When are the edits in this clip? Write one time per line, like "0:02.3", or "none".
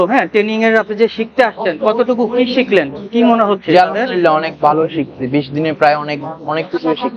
none